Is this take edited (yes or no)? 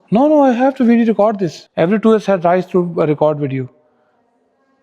yes